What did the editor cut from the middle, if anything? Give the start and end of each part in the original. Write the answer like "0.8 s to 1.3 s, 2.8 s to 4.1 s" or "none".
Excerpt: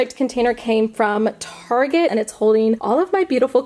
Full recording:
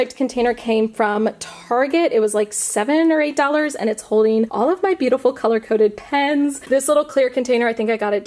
2.1 s to 3.8 s